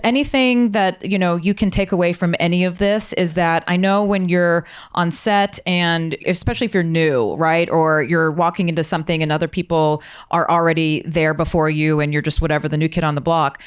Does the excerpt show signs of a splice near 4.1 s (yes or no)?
no